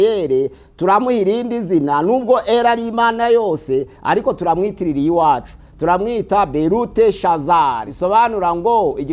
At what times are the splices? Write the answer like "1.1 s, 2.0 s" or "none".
7.9 s